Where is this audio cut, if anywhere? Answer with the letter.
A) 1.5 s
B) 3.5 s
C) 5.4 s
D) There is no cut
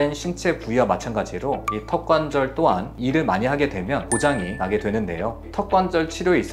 C